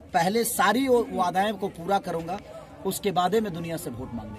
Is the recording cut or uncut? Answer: uncut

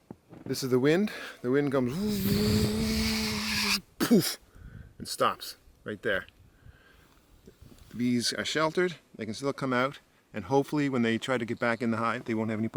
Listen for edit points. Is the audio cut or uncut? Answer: uncut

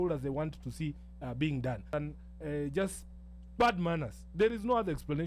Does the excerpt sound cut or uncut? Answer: cut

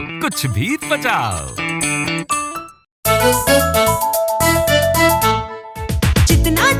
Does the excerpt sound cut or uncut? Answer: cut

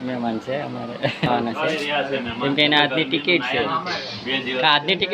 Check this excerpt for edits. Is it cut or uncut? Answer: cut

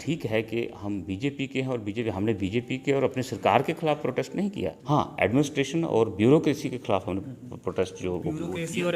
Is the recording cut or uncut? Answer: cut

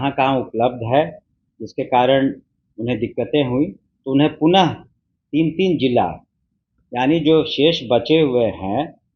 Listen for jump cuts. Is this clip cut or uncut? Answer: uncut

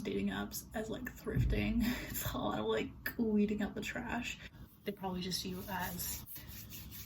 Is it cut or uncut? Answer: cut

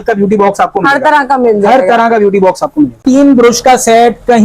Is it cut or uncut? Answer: cut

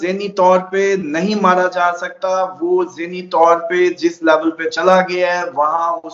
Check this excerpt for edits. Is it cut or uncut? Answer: uncut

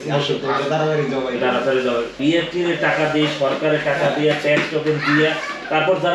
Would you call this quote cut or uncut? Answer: uncut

